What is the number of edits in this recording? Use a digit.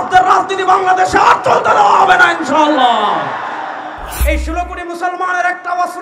1